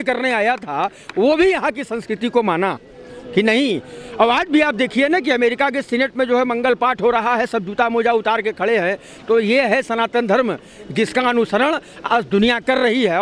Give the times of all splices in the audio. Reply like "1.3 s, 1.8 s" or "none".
none